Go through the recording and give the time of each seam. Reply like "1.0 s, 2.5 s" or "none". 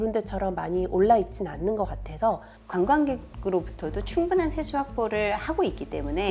2.5 s